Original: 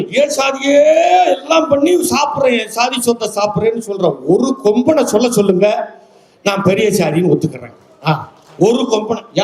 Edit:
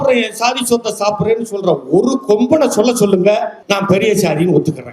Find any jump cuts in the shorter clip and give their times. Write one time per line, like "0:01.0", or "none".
0:03.5